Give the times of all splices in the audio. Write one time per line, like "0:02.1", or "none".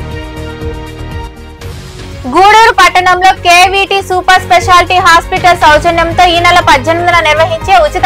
0:01.1

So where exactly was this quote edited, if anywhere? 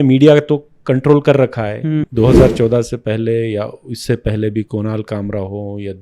0:02.0

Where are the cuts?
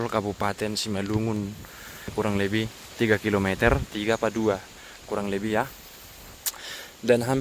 0:02.1

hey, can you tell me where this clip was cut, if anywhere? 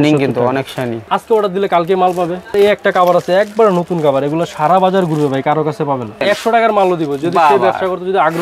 0:01.1
0:02.5
0:06.2

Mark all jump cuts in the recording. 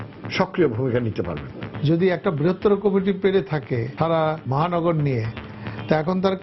0:01.6
0:04.3

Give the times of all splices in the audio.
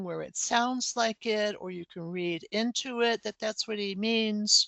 none

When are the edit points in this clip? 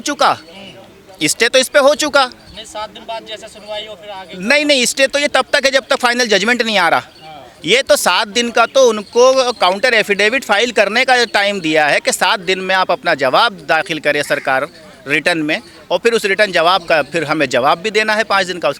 none

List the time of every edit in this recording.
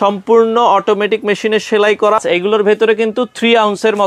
0:02.2

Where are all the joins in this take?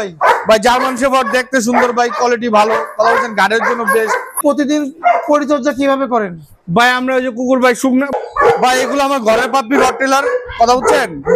0:04.4
0:08.1

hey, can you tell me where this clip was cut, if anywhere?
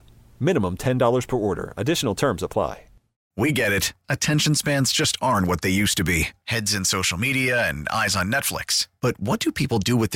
0:03.2

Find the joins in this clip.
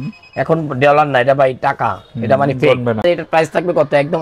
0:03.0

